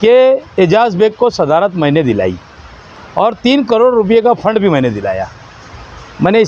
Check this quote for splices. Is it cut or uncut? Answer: uncut